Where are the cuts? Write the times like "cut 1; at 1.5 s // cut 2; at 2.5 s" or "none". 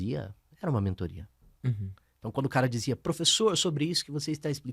none